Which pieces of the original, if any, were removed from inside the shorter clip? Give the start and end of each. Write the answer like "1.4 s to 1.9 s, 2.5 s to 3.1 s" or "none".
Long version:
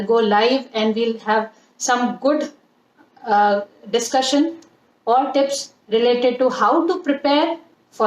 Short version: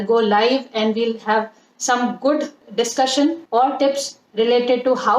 2.6 s to 3.8 s, 4.6 s to 5.0 s